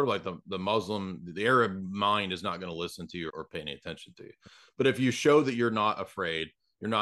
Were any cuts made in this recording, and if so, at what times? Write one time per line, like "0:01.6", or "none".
0:03.3